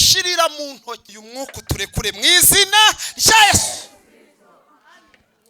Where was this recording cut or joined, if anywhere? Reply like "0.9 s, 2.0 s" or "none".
1.1 s